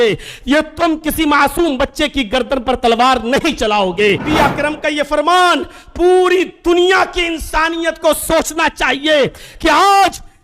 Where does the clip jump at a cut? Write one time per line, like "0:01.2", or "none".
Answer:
0:04.2